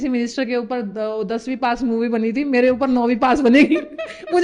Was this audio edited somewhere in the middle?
no; 0 cuts

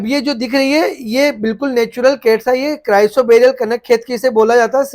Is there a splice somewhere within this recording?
no; 0 cuts

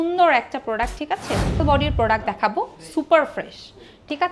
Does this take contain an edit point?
yes; 1 cut; at 1.6 s

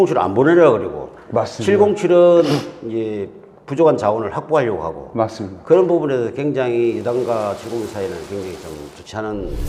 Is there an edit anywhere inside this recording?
no; 0 cuts

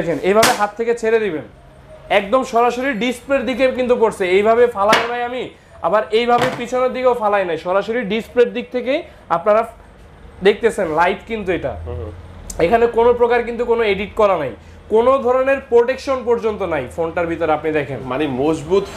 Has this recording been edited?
no; 0 cuts

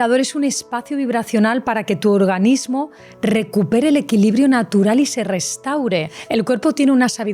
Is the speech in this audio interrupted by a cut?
yes; 1 cut; at 6.2 s

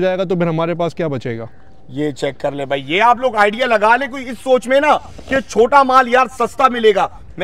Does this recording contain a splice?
no; 0 cuts

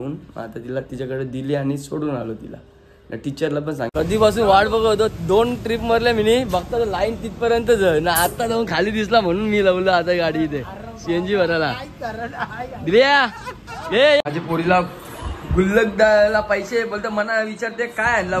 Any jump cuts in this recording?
yes; 2 cuts; at 3.9 s, 14.2 s

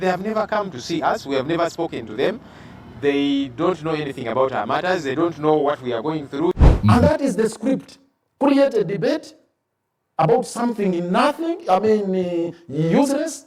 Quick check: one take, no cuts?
no; 1 cut; at 6.6 s

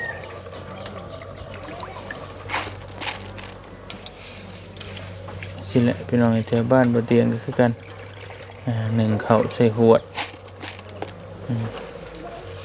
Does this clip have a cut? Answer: no; 0 cuts

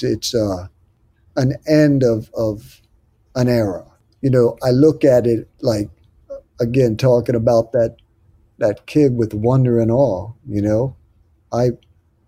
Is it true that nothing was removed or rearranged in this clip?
yes; 0 cuts

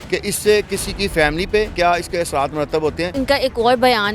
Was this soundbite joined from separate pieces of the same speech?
yes; 2 cuts; at 1.7 s, 3.1 s

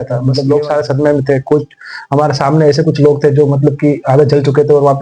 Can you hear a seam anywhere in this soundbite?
no; 0 cuts

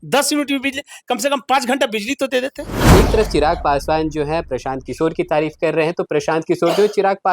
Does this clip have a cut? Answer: yes; 1 cut; at 2.7 s

